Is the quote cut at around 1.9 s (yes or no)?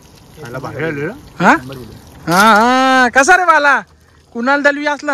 no